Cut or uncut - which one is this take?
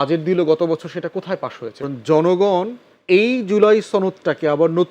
cut